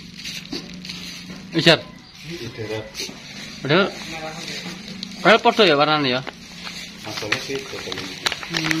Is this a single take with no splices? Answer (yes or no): yes